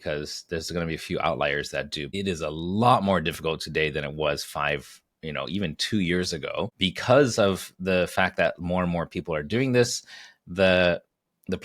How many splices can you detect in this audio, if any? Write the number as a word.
two